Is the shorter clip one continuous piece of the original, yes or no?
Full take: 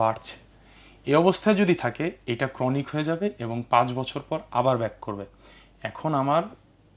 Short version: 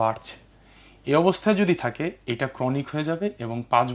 yes